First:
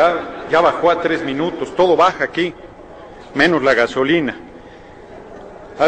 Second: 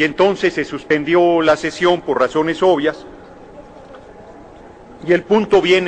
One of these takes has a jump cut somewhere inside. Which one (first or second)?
first